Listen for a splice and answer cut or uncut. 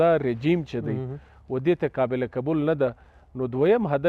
uncut